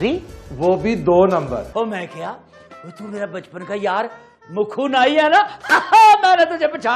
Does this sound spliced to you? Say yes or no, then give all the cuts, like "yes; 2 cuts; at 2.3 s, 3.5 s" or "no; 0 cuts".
yes; 1 cut; at 1.6 s